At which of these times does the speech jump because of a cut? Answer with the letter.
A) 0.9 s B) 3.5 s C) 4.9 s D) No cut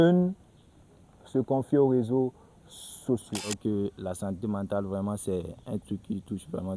B